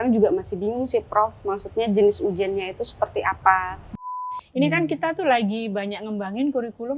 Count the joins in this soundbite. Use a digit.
1